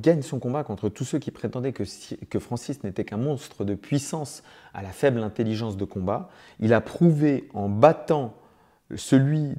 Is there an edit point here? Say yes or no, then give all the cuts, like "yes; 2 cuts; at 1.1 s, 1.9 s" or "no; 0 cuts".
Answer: no; 0 cuts